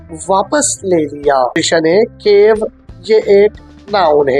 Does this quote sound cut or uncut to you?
cut